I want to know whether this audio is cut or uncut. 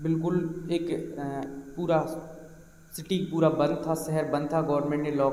uncut